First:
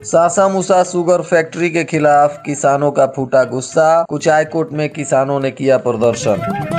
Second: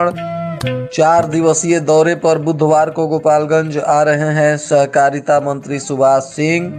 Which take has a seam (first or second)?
first